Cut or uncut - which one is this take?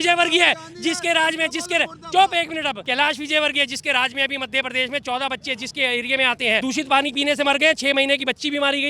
cut